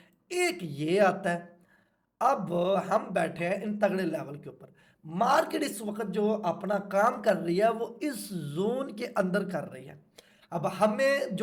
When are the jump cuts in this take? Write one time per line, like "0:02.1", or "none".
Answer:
none